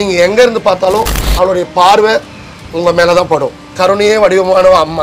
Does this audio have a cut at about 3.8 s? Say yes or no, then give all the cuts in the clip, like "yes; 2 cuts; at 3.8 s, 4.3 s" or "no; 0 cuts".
yes; 1 cut; at 3.8 s